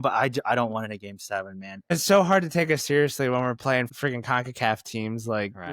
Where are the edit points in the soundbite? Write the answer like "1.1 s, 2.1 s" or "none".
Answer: 1.9 s, 3.9 s